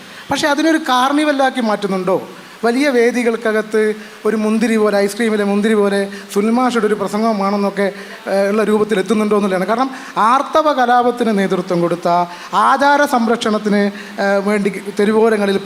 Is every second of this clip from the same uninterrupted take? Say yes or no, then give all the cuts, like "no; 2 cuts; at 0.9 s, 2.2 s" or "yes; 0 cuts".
yes; 0 cuts